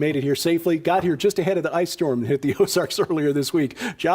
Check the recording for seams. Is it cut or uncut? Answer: cut